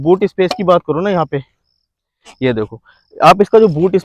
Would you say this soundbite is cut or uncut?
uncut